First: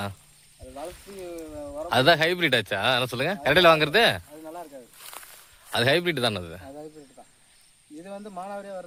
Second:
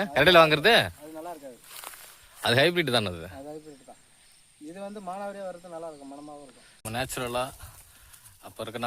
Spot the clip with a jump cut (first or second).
second